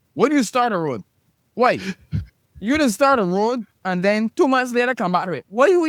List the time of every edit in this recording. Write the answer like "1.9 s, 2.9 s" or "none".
none